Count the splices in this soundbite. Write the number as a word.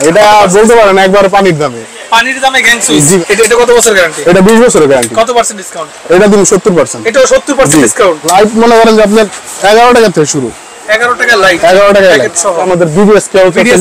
three